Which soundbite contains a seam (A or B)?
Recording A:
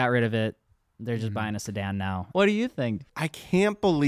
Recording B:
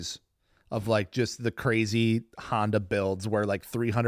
A